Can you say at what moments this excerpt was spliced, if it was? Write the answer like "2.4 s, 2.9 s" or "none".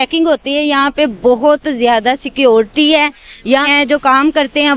3.7 s